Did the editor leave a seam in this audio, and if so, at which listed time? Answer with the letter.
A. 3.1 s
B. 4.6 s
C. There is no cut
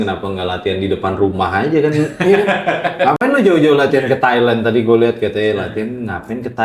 C